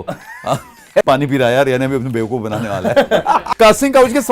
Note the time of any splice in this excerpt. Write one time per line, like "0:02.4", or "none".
0:01.0
0:03.5